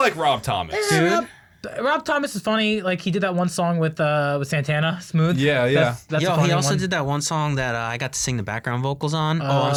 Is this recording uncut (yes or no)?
yes